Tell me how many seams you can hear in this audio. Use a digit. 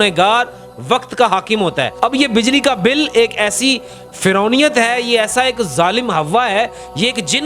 1